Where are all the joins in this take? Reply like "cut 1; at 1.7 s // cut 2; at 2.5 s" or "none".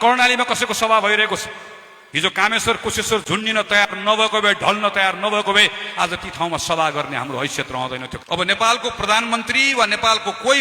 cut 1; at 8.1 s